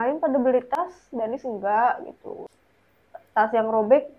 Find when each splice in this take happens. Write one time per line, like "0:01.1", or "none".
0:02.3